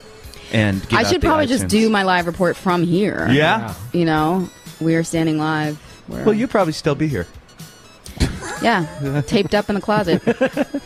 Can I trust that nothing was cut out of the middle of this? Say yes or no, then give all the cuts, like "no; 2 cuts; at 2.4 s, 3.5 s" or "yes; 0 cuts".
yes; 0 cuts